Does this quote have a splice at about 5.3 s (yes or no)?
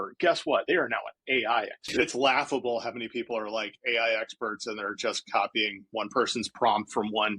no